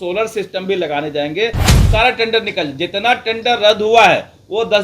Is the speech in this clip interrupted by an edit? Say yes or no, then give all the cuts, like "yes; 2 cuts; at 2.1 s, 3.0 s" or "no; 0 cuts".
yes; 1 cut; at 1.8 s